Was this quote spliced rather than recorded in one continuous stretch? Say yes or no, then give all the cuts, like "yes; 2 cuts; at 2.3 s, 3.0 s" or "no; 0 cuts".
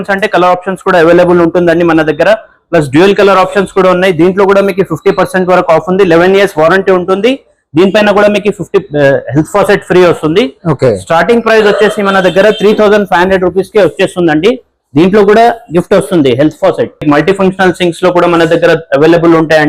yes; 1 cut; at 17.0 s